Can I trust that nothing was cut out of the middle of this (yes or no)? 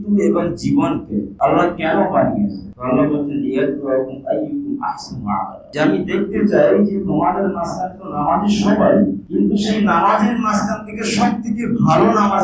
yes